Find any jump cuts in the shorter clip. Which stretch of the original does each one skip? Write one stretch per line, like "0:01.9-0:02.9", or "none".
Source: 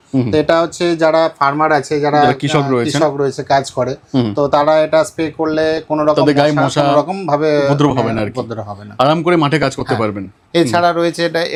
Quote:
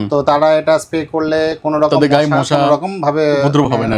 none